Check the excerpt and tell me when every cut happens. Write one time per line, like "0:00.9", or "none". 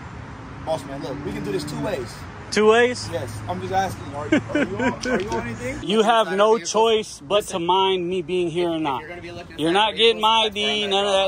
0:05.7